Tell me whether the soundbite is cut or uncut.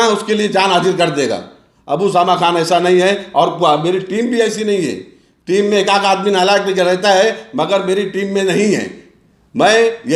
uncut